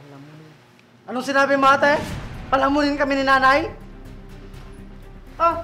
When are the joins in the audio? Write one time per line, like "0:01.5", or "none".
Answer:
none